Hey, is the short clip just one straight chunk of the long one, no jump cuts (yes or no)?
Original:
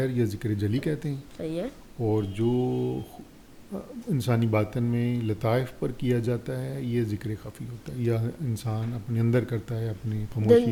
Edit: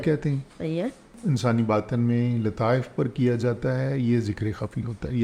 no